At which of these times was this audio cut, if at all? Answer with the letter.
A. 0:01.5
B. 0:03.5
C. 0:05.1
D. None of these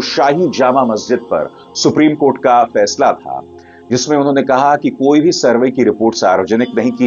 D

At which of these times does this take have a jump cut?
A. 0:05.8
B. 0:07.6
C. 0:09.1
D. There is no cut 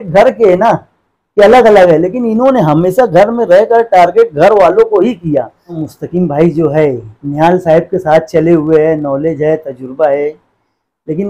A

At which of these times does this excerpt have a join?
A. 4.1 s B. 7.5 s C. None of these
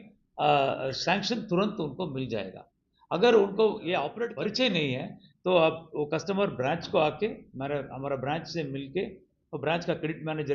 A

